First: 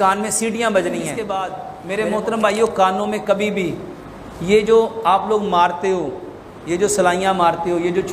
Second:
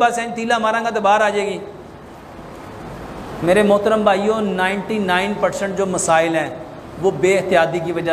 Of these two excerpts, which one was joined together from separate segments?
first; 1 cut; at 1.2 s

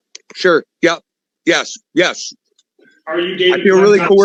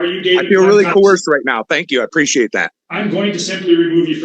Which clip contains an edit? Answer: second; 1 cut; at 2.7 s

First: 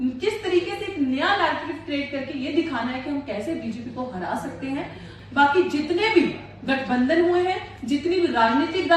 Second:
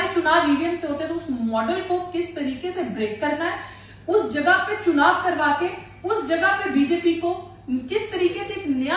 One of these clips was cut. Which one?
first; 1 cut; at 5.0 s

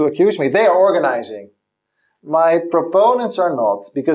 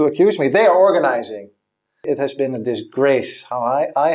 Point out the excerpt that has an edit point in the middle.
second; 1 cut; at 2.0 s

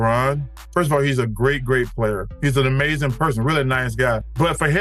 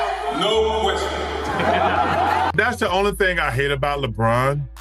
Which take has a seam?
second; 1 cut; at 2.5 s

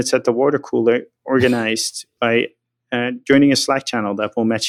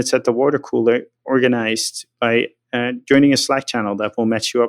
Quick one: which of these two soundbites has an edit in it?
second; 1 cut; at 2.6 s

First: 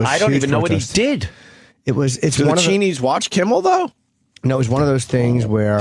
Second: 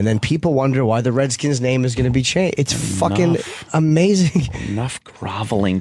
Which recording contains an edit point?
second; 1 cut; at 3.7 s

